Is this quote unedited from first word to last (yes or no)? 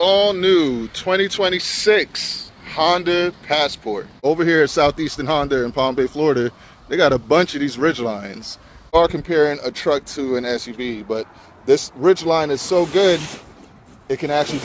no